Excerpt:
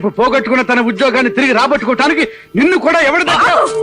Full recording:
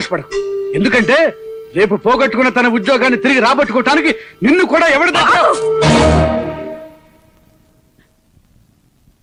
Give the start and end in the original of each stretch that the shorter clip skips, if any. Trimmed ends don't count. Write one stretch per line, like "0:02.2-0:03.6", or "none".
none